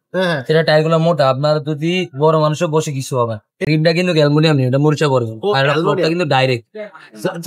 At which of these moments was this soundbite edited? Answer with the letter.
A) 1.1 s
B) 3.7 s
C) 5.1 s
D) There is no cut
B